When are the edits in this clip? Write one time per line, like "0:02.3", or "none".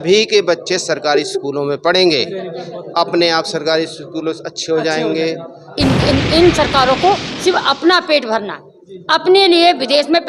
0:05.8